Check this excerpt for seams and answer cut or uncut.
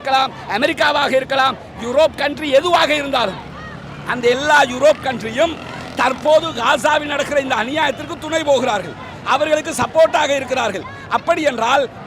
uncut